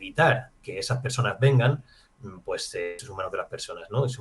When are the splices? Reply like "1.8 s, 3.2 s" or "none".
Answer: 3.0 s